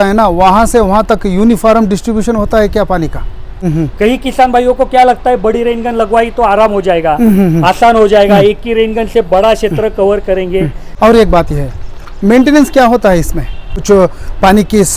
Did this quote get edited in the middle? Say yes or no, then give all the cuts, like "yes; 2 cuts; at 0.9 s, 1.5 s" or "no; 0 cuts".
yes; 3 cuts; at 3.5 s, 10.8 s, 13.7 s